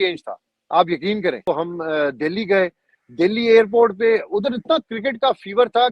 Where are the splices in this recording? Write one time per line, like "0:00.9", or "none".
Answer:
0:01.4